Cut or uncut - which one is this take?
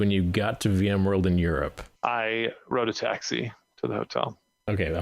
cut